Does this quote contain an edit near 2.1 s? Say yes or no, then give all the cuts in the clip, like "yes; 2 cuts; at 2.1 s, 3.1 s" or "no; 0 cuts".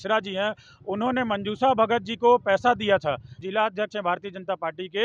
no; 1 cut; at 3.3 s